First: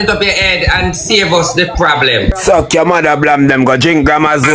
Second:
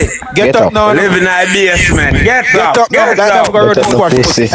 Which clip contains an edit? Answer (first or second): first